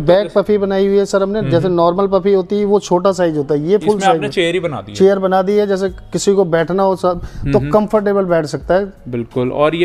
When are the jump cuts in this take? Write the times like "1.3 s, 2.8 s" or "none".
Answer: none